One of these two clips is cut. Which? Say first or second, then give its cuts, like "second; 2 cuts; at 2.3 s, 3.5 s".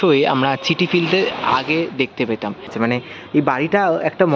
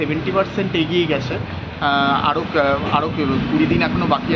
first; 1 cut; at 2.7 s